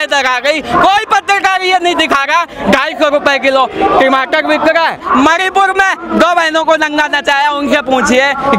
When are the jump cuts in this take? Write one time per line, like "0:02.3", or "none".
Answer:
0:05.0